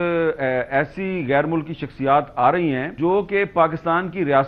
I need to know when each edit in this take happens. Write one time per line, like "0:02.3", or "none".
0:02.9